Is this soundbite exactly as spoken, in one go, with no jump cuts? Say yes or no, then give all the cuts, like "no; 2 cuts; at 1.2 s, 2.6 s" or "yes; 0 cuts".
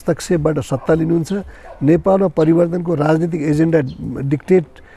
yes; 0 cuts